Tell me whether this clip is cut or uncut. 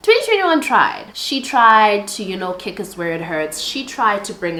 uncut